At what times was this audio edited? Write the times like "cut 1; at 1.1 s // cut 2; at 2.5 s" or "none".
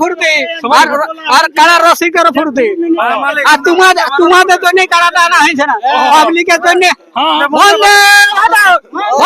cut 1; at 7.4 s